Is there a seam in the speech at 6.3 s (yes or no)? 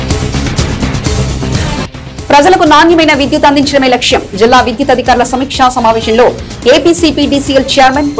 no